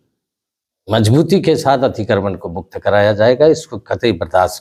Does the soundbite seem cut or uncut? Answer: uncut